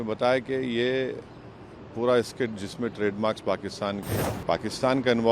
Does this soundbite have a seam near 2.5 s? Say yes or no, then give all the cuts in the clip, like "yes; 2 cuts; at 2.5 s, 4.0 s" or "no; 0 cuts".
no; 1 cut; at 4.1 s